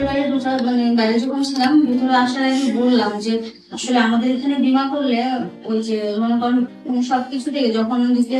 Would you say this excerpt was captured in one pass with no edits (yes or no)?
yes